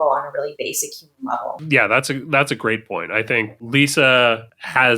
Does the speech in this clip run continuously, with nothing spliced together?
no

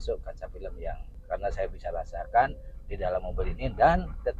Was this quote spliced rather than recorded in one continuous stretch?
yes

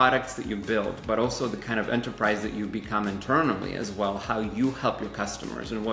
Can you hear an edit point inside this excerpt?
no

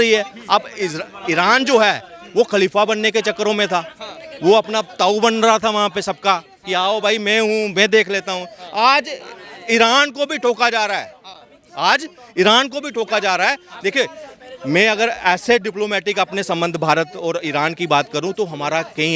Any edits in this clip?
no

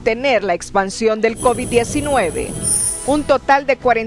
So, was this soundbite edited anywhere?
yes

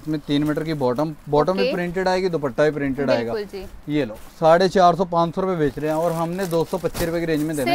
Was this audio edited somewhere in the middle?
no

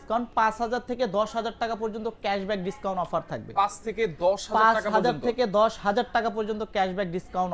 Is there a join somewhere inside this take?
no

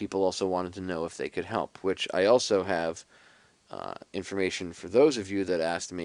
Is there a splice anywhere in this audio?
no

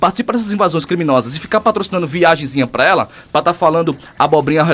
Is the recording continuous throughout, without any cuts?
yes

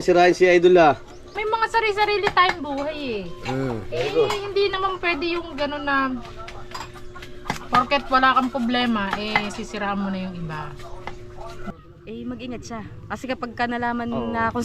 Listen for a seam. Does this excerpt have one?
yes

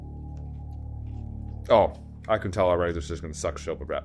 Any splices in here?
yes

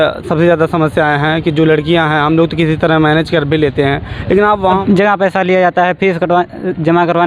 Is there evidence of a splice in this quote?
yes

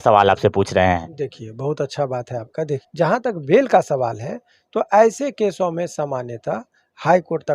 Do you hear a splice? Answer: yes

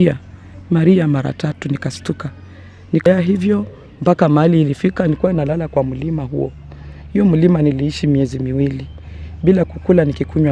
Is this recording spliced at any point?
yes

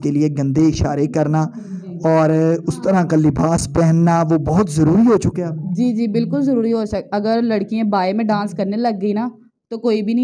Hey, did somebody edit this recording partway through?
no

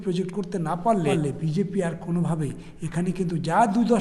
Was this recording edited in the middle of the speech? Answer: yes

